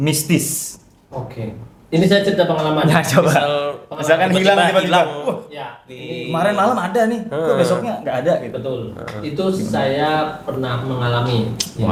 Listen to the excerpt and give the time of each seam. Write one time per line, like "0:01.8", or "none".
none